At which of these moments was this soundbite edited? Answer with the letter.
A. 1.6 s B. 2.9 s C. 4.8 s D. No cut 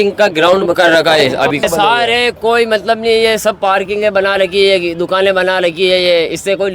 A